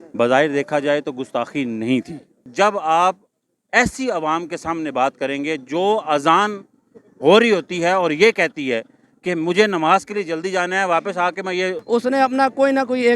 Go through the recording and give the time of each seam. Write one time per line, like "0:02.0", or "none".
0:02.4
0:11.8